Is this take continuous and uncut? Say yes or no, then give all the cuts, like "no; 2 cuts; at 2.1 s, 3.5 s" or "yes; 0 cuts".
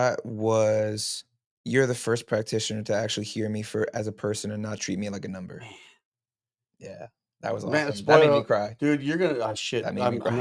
yes; 0 cuts